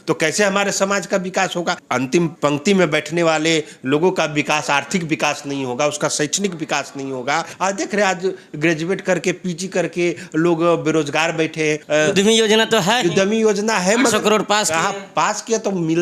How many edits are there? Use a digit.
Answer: 3